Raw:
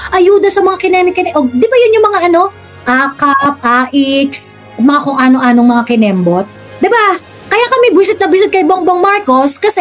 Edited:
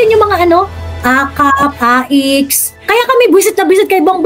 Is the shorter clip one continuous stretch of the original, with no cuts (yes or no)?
no